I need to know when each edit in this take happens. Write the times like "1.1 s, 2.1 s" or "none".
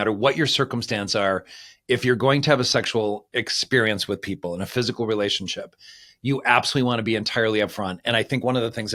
none